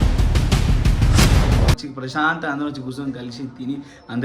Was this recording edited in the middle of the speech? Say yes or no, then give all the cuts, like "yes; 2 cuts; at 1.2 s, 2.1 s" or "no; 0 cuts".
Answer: yes; 1 cut; at 1.8 s